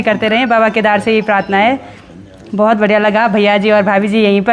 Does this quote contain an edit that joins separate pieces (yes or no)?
no